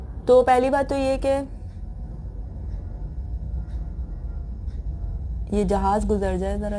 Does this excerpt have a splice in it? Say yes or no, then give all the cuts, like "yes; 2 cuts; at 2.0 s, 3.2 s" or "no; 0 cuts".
no; 0 cuts